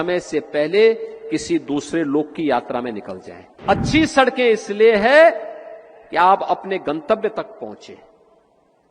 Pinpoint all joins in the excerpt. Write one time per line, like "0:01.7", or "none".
0:03.6